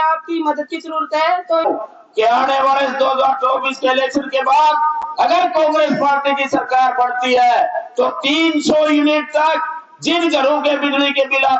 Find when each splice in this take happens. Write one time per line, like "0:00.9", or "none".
0:01.6